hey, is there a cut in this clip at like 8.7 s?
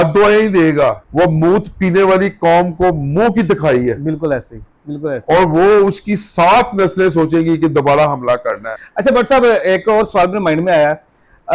yes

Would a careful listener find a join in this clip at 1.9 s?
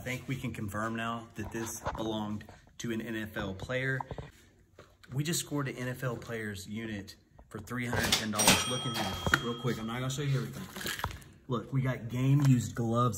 no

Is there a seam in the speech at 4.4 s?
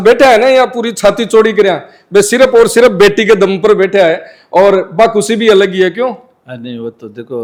no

